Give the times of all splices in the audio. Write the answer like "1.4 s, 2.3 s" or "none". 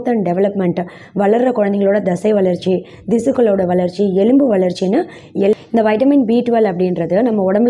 5.5 s